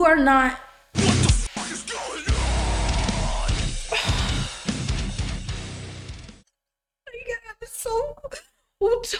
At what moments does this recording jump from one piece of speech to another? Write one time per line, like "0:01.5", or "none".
none